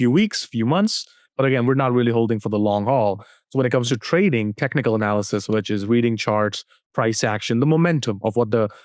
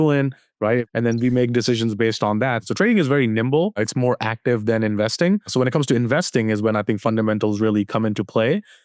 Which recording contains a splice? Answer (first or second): second